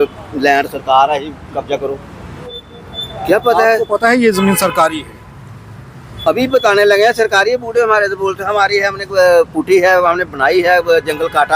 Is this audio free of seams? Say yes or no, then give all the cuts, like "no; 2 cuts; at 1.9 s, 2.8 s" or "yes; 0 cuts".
no; 1 cut; at 2.6 s